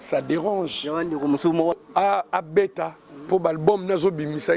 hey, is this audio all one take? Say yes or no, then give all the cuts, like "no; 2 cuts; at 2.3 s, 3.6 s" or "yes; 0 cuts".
no; 1 cut; at 1.7 s